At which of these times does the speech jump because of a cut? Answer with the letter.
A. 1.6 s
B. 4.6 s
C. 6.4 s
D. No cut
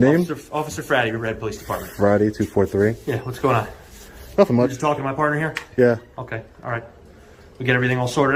D